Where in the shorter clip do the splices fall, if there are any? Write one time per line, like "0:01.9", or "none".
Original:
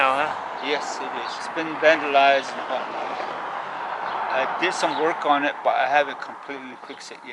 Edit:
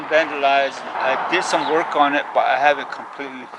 0:01.0